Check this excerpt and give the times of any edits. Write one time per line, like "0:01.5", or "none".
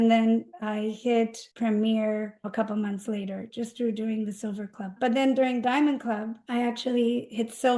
0:00.9
0:02.5
0:03.5
0:05.0
0:06.4